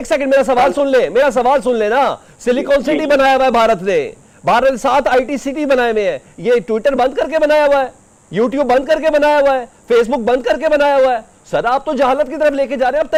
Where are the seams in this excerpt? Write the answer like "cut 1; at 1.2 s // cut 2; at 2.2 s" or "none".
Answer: none